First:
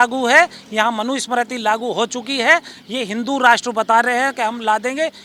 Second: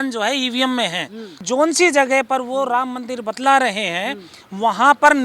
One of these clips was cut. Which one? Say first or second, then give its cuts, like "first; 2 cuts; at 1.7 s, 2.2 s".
second; 1 cut; at 1.4 s